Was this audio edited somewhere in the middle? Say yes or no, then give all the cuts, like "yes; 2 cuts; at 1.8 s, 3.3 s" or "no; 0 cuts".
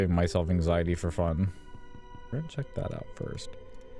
yes; 1 cut; at 2.3 s